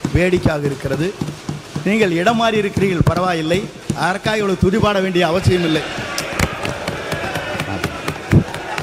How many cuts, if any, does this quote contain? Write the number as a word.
zero